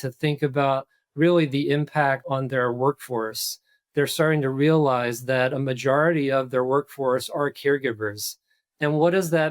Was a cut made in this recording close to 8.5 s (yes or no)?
no